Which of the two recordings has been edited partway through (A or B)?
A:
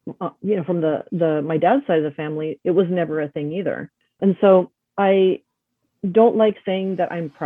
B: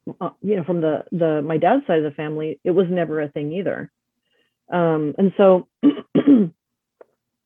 A